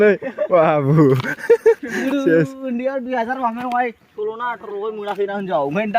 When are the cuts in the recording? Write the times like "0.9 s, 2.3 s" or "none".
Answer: 4.1 s